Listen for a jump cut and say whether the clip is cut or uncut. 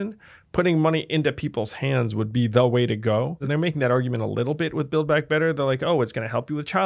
cut